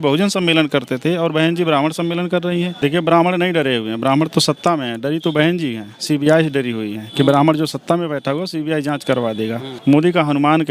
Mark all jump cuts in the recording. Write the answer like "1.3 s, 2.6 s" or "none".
2.7 s, 9.7 s